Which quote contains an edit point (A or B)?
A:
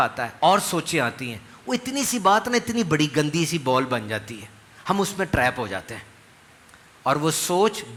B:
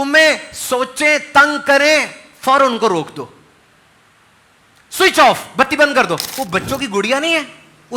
B